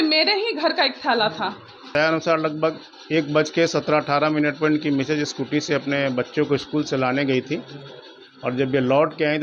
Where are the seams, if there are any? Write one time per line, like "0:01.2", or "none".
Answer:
0:01.9